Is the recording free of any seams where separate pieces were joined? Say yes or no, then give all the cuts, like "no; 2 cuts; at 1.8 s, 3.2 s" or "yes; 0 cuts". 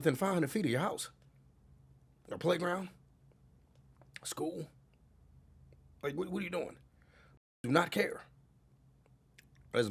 yes; 0 cuts